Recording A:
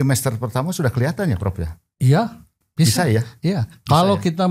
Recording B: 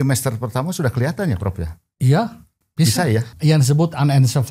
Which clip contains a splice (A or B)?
B